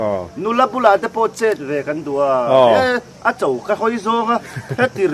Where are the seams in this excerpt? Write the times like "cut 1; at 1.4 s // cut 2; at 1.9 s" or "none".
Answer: none